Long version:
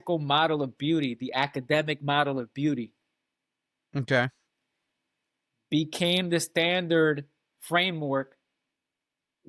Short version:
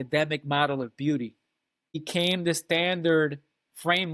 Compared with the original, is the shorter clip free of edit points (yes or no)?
no